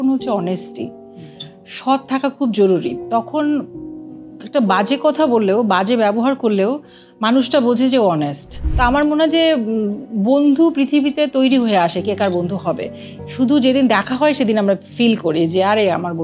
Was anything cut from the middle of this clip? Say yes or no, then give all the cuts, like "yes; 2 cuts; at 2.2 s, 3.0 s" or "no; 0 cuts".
yes; 1 cut; at 8.6 s